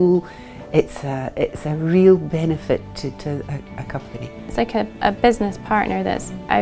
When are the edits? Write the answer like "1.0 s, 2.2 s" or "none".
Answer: 4.5 s